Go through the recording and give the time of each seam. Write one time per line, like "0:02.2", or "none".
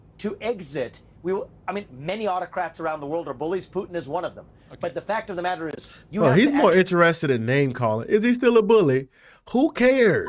none